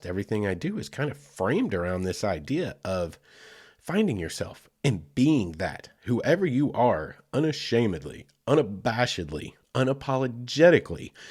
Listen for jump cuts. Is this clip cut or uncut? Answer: uncut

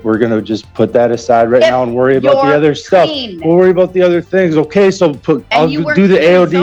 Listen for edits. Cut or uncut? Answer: uncut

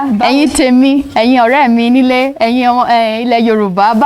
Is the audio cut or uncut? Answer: uncut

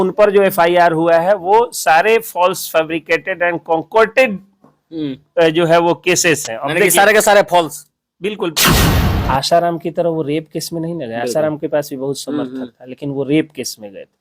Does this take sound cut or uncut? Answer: cut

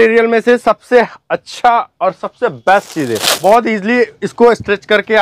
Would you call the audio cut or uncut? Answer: cut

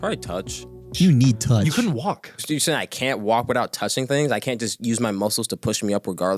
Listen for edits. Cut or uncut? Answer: cut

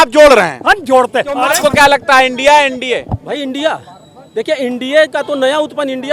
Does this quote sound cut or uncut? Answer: cut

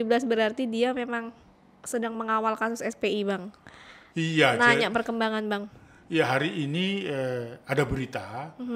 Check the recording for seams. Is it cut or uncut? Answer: uncut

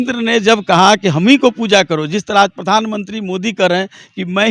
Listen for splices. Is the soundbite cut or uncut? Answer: uncut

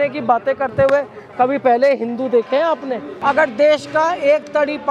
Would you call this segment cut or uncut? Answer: cut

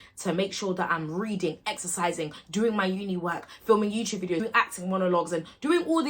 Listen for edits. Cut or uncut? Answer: cut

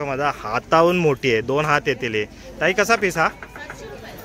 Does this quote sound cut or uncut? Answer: uncut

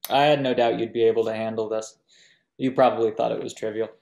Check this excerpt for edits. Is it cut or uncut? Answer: uncut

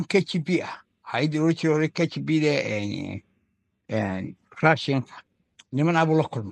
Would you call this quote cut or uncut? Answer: uncut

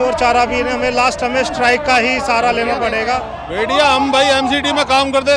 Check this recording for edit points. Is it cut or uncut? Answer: cut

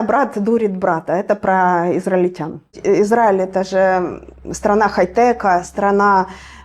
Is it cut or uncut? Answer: cut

